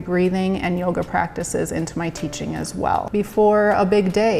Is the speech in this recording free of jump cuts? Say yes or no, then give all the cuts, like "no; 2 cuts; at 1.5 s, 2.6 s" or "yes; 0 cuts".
no; 1 cut; at 3.1 s